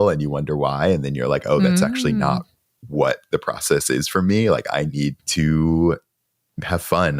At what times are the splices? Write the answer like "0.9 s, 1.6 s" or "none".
5.2 s